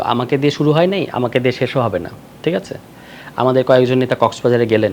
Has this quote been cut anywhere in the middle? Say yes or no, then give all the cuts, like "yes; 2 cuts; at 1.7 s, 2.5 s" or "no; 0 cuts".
no; 0 cuts